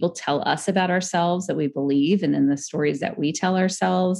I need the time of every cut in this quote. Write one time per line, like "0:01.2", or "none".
none

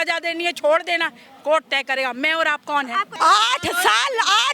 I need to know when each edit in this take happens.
0:03.1

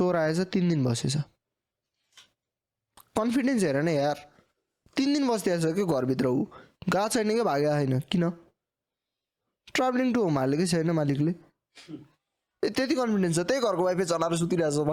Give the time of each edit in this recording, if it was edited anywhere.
none

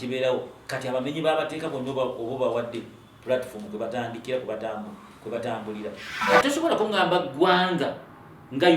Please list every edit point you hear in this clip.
0:06.1

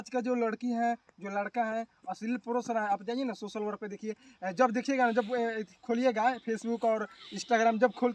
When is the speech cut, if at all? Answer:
none

